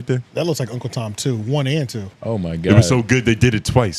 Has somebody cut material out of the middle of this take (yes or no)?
yes